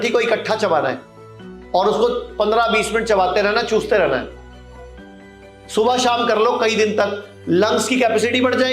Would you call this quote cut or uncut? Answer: uncut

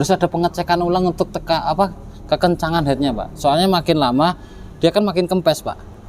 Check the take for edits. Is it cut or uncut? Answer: uncut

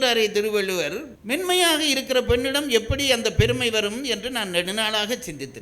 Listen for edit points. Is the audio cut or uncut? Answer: cut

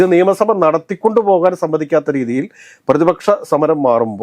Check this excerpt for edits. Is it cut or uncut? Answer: uncut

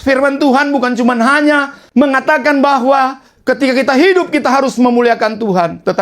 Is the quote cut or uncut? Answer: cut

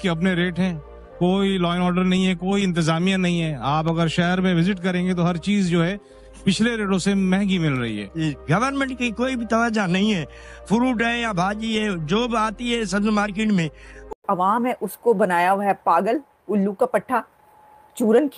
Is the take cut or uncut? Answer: cut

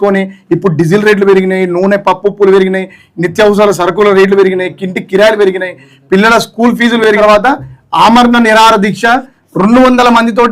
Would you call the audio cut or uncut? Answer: cut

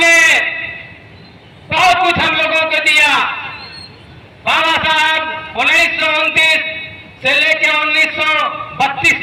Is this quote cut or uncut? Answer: uncut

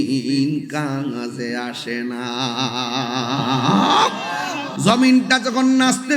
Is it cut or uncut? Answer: cut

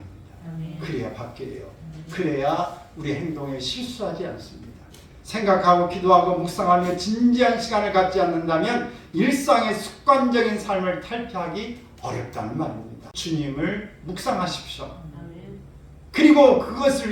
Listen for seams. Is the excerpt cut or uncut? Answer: cut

